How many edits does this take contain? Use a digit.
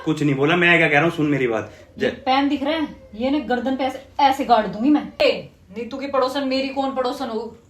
1